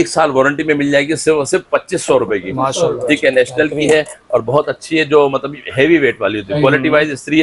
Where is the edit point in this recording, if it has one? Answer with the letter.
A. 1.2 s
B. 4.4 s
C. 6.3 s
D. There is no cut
D